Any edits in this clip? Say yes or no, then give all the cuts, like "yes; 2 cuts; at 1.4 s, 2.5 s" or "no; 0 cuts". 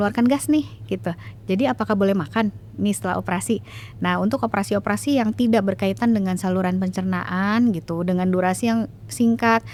no; 0 cuts